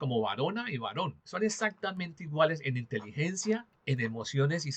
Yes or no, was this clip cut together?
yes